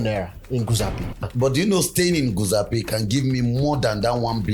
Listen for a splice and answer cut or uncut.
cut